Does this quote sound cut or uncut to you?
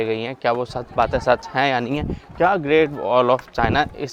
uncut